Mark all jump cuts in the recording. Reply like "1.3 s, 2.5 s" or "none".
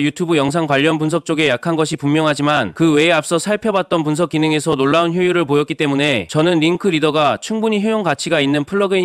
2.7 s, 6.2 s